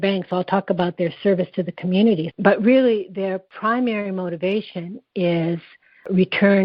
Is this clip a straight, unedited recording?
no; 2 cuts; at 2.3 s, 3.5 s

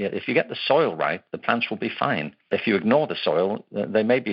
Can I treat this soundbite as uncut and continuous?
no; 1 cut; at 2.5 s

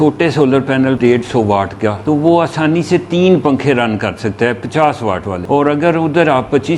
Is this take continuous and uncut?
no; 3 cuts; at 1.0 s, 2.0 s, 5.3 s

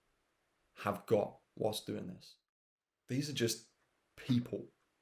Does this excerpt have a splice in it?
yes; 1 cut; at 2.5 s

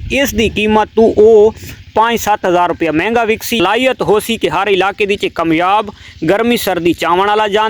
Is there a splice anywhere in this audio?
yes; 1 cut; at 3.6 s

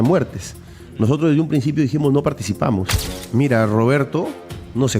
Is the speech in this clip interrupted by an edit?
yes; 1 cut; at 3.2 s

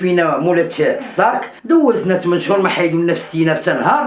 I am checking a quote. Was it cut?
yes; 1 cut; at 1.5 s

